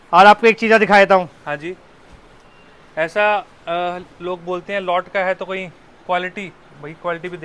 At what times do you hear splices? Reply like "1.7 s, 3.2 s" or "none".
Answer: none